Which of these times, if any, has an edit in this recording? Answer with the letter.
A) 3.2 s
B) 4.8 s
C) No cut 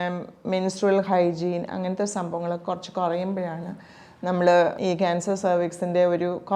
B